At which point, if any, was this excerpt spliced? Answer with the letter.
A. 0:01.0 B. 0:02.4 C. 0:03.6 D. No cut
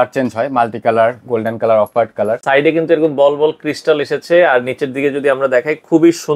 B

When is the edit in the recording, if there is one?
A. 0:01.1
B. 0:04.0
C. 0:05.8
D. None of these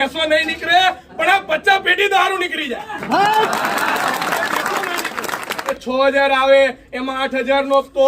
C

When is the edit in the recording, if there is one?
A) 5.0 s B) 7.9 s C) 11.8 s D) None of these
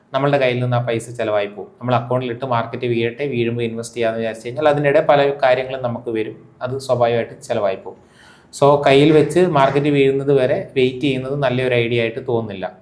D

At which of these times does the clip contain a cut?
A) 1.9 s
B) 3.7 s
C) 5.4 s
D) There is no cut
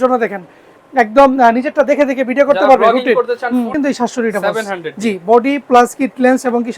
B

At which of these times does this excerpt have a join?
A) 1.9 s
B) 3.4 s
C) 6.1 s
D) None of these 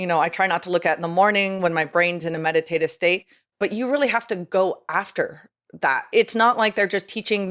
C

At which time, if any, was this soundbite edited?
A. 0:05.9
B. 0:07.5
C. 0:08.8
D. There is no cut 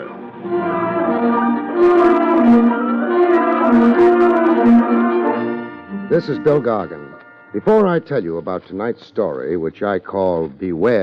D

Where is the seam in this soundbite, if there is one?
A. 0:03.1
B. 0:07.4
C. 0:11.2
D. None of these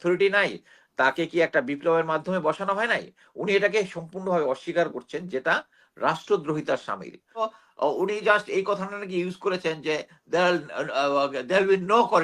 B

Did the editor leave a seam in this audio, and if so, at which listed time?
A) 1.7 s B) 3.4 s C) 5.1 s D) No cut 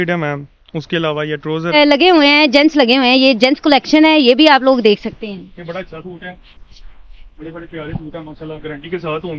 A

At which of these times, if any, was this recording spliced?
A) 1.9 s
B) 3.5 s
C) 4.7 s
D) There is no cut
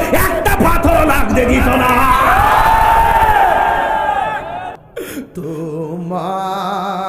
C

